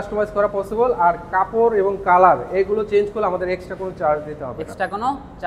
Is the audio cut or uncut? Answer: uncut